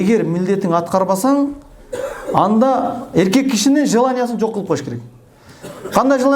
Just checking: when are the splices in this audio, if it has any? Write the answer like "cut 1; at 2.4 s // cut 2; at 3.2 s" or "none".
none